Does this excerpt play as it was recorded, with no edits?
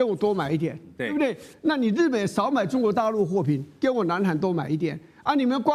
yes; 0 cuts

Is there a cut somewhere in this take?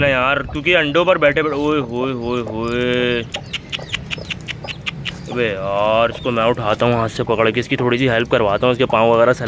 no; 0 cuts

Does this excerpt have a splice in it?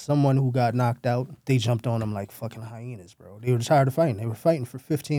yes; 1 cut; at 1.3 s

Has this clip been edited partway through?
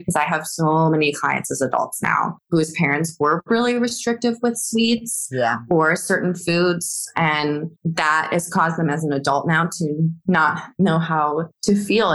no; 0 cuts

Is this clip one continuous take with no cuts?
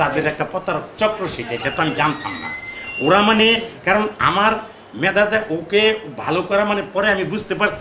yes; 0 cuts

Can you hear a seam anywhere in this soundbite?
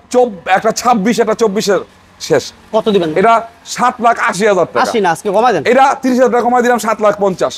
no; 0 cuts

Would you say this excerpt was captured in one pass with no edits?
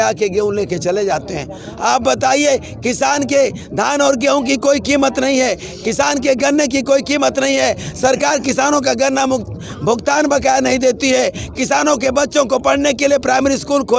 yes; 0 cuts

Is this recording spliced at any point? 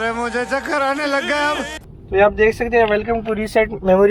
yes; 1 cut; at 1.8 s

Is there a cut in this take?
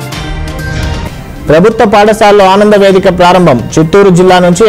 no; 0 cuts

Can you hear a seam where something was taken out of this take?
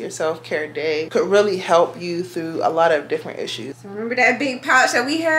yes; 2 cuts; at 1.1 s, 3.7 s

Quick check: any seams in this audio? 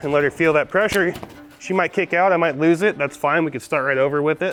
no; 0 cuts

